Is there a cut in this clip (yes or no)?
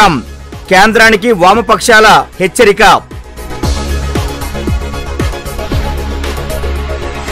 no